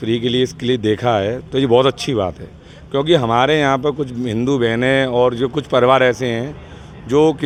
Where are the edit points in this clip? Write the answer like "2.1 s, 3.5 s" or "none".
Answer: none